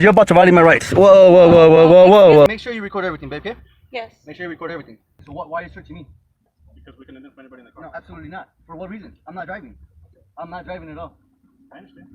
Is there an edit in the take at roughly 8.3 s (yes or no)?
no